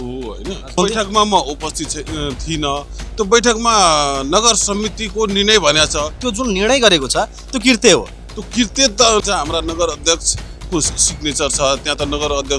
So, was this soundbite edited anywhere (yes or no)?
yes